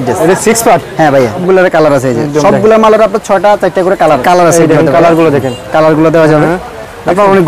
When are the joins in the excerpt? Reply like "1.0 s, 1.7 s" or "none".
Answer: 1.4 s, 4.2 s